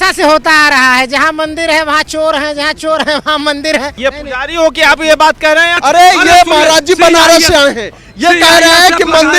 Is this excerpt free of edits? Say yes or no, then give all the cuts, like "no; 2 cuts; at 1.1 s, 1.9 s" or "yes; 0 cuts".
no; 2 cuts; at 3.9 s, 5.8 s